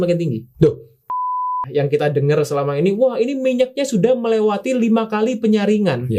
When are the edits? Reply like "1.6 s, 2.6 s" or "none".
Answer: 1.3 s